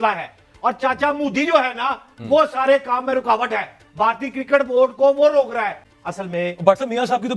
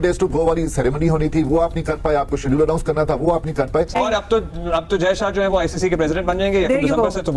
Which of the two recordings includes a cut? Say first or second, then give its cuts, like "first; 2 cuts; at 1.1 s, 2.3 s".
second; 1 cut; at 3.9 s